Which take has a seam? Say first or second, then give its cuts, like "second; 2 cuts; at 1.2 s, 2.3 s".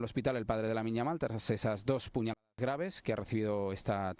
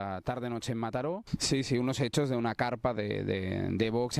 second; 1 cut; at 1.3 s